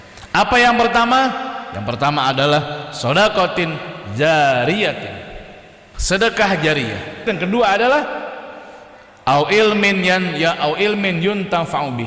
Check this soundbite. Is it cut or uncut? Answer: cut